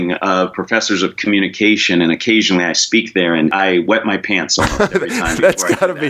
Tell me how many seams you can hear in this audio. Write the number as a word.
one